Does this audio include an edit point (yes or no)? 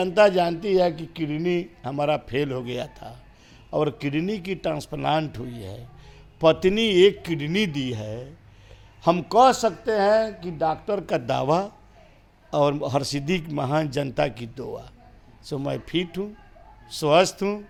no